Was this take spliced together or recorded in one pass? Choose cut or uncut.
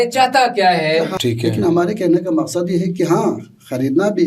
cut